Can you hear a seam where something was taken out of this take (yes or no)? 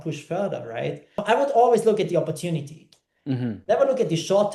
yes